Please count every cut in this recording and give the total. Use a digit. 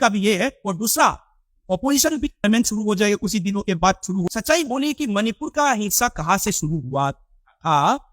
2